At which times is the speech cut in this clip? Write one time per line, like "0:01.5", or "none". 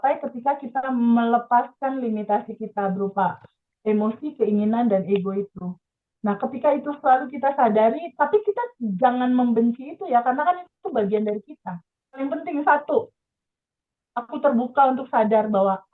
0:12.2